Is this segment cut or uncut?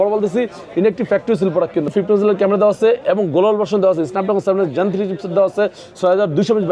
cut